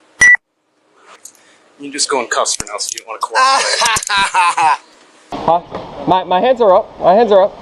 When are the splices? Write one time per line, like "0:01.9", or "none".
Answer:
0:01.2
0:05.4